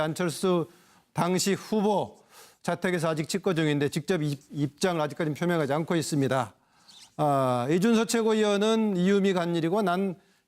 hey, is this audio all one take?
no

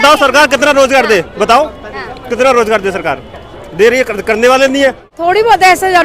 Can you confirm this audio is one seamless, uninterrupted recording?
no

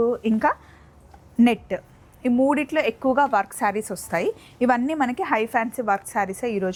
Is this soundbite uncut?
yes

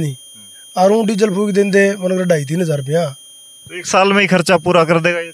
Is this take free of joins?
yes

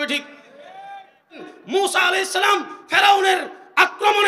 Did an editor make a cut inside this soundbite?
yes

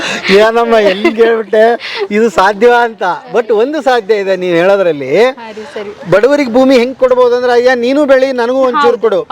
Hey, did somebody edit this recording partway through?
no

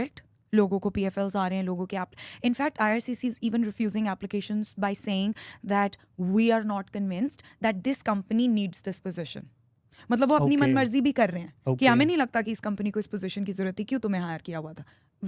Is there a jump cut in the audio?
no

